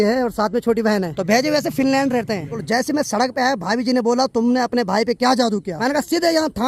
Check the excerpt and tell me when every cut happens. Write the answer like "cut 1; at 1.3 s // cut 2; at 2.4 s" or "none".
cut 1; at 1.1 s // cut 2; at 2.6 s // cut 3; at 5.7 s